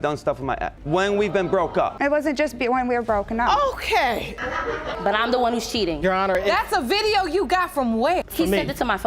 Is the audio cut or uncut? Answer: cut